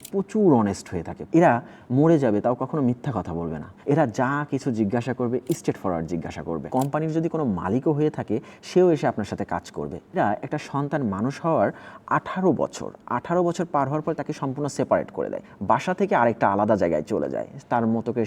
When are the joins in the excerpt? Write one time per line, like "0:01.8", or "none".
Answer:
0:01.1
0:03.7
0:06.6
0:10.2
0:15.4